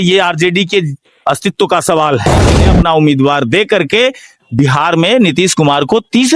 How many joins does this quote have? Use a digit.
1